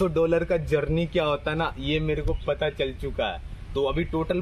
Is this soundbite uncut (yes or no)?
yes